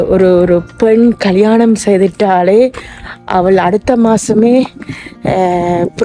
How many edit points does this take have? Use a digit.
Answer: 0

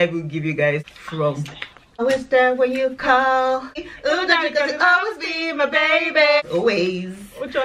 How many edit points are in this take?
3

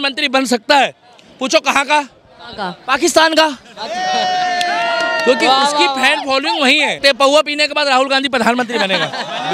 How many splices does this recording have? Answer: 1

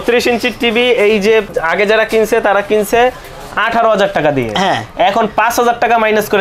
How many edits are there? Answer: 1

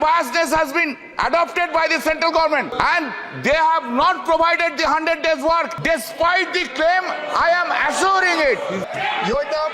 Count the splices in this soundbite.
3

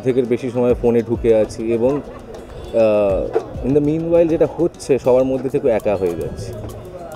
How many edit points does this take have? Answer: 0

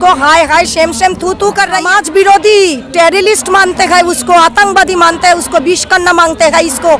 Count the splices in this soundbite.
1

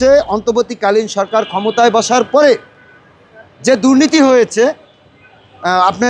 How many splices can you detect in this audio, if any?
0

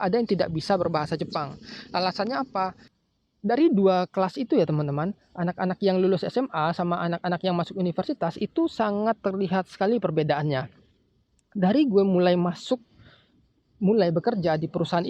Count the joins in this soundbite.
1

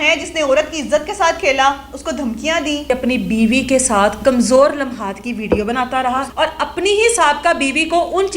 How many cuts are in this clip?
2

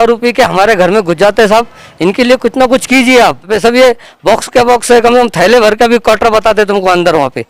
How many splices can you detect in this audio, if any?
1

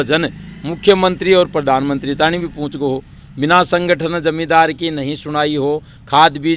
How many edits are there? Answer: 0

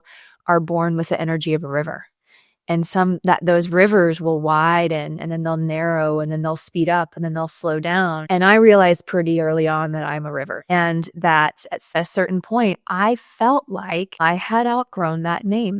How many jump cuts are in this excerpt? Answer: 0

